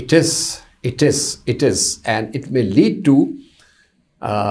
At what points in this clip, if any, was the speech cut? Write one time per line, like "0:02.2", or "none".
none